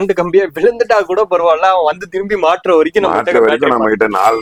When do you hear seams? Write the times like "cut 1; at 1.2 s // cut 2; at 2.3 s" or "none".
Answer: none